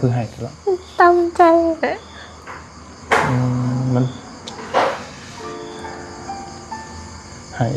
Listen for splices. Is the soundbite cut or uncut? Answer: uncut